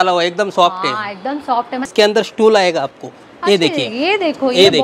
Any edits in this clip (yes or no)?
yes